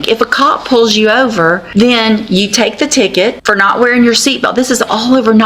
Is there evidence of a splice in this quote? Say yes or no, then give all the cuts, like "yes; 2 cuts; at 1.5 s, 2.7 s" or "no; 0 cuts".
yes; 2 cuts; at 1.6 s, 3.4 s